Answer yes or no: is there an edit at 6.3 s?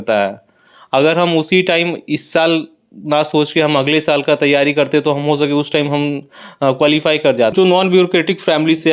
no